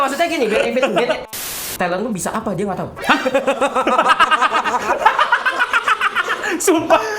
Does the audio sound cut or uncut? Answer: cut